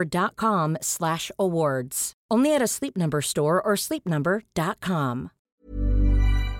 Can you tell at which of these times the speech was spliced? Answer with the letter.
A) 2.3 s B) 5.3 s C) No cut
B